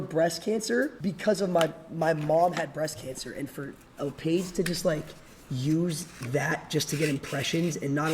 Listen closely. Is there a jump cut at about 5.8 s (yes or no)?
no